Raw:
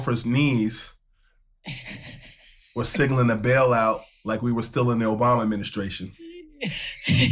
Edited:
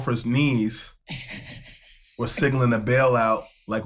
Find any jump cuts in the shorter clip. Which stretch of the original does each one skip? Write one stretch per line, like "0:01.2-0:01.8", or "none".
0:00.9-0:01.5